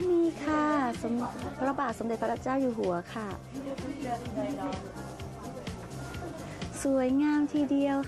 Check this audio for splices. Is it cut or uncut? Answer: uncut